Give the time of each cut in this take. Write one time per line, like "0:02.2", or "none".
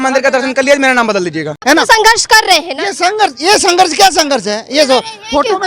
0:01.5